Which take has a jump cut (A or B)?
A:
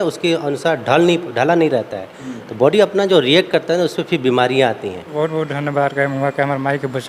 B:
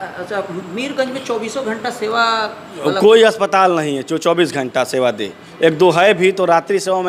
A